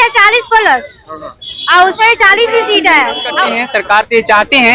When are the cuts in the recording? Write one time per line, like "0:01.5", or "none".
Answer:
0:03.6